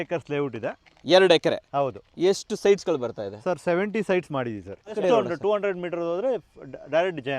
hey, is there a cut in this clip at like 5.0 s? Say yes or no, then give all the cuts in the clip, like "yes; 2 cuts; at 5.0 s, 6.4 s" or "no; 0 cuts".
yes; 1 cut; at 5.0 s